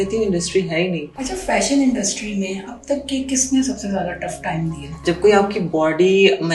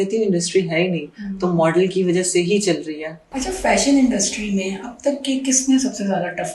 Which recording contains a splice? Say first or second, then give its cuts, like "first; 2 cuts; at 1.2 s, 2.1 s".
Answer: first; 2 cuts; at 1.1 s, 4.9 s